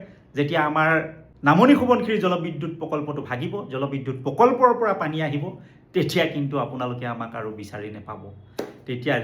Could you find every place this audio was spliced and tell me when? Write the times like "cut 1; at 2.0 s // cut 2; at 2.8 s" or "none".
cut 1; at 1.2 s